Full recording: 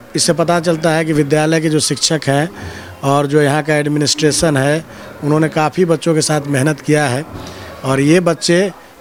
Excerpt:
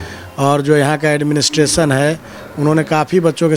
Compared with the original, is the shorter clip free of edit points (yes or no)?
yes